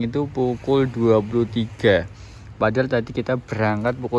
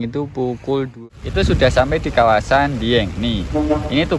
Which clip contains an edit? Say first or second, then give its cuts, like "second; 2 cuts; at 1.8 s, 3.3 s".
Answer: second; 1 cut; at 0.9 s